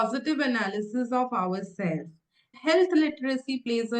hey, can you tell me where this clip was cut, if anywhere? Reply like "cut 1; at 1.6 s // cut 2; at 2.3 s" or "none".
cut 1; at 2.5 s